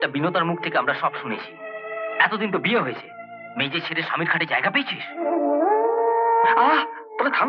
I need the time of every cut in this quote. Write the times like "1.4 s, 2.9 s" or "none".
6.6 s

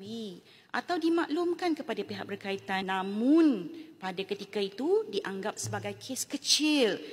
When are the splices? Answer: 2.8 s

